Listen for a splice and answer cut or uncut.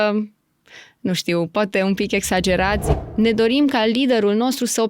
cut